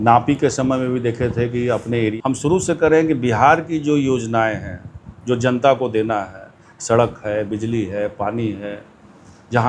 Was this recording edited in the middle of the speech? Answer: yes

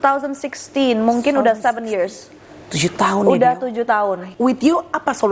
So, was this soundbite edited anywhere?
yes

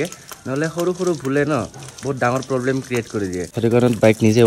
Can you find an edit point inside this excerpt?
no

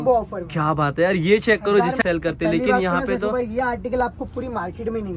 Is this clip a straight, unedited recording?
no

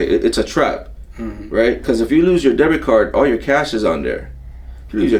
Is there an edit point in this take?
no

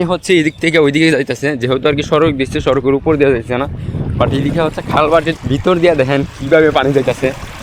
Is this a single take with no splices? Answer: yes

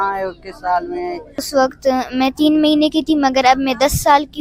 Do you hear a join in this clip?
yes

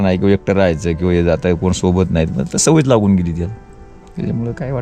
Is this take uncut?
yes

